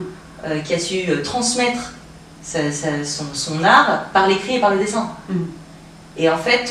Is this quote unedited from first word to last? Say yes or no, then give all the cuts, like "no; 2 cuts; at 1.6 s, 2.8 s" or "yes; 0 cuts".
yes; 0 cuts